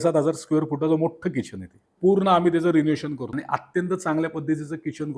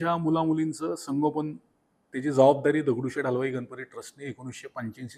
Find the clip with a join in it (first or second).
first